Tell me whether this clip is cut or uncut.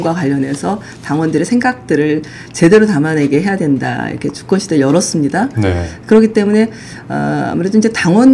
uncut